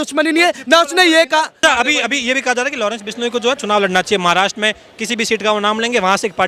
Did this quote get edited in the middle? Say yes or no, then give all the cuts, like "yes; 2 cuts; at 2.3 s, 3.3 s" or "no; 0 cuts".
yes; 1 cut; at 1.6 s